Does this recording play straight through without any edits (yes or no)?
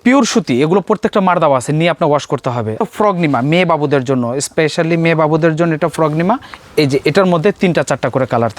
no